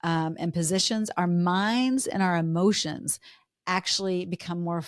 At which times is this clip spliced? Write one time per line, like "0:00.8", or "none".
none